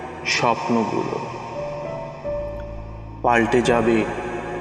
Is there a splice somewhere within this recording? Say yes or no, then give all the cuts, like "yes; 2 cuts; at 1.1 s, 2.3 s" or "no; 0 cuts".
no; 0 cuts